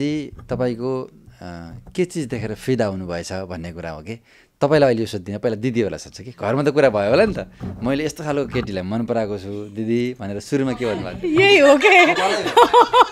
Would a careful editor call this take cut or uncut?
uncut